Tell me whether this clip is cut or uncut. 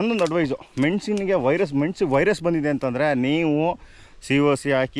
uncut